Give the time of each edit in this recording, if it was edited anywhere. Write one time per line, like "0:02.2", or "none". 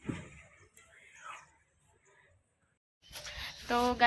0:02.8